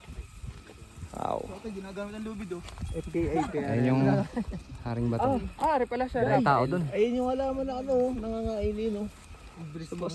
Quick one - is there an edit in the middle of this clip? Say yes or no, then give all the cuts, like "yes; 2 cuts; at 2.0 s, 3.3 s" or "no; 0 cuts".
no; 0 cuts